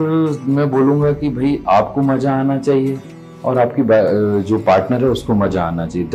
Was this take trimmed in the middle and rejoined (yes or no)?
no